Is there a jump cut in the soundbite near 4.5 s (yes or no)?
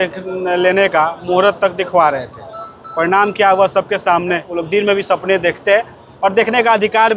yes